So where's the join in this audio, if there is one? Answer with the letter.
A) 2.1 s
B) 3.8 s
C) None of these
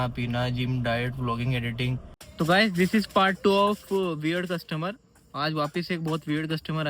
A